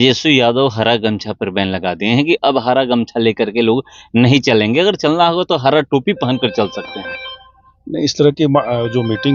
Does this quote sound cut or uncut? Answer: uncut